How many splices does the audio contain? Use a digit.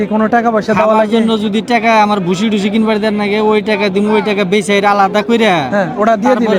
0